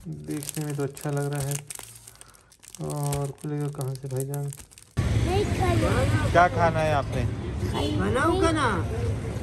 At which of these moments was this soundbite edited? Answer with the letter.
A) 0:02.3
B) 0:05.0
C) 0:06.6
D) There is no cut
B